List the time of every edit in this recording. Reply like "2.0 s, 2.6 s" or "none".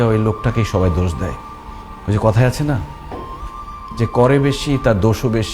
none